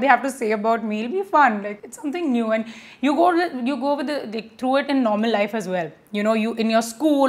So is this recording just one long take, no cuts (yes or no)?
yes